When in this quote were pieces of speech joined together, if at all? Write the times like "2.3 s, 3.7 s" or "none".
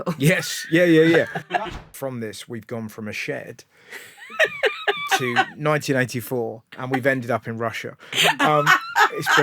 1.4 s